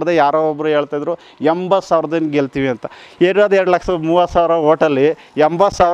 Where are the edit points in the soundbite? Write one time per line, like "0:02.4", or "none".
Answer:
none